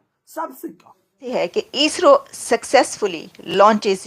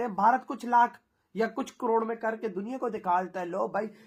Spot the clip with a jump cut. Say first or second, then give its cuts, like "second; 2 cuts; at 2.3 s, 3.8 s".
first; 1 cut; at 1.3 s